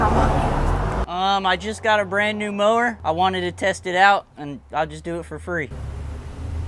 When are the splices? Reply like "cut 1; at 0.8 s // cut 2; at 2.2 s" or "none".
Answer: none